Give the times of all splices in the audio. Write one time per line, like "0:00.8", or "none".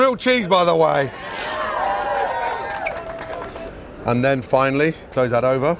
none